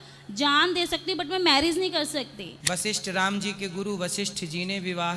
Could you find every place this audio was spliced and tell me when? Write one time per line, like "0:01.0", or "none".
0:02.5